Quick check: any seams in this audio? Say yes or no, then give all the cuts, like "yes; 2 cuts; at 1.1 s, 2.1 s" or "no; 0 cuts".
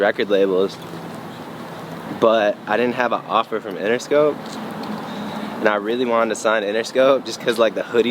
no; 0 cuts